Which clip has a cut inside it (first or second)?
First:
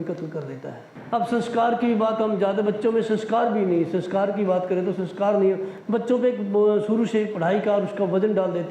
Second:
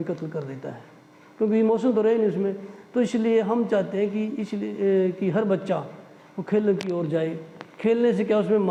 first